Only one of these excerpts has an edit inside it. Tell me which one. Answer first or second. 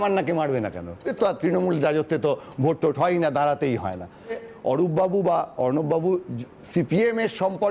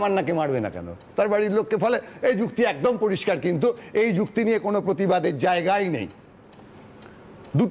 first